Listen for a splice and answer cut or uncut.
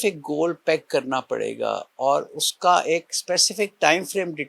uncut